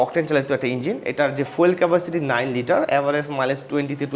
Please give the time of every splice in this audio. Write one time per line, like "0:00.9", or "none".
none